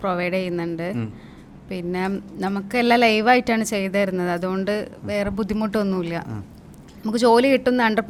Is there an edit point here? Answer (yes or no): no